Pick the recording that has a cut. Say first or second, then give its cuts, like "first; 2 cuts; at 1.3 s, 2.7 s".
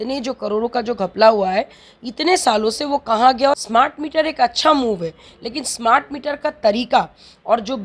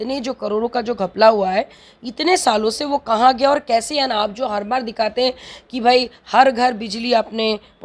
first; 1 cut; at 3.6 s